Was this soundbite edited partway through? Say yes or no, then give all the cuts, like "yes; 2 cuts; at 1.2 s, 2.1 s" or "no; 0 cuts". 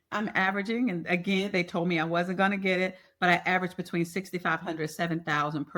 no; 0 cuts